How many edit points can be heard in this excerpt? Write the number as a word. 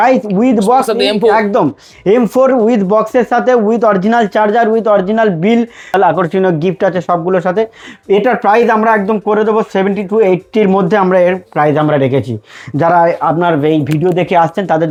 zero